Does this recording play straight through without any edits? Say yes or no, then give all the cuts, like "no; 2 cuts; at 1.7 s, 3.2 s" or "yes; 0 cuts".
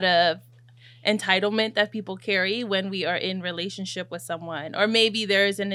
yes; 0 cuts